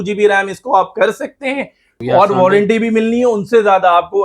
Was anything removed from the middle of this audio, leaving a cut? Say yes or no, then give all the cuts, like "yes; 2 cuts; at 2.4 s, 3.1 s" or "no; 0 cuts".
yes; 1 cut; at 1.9 s